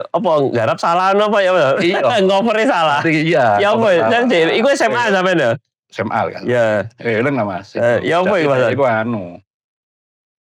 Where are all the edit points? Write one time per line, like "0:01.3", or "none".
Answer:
none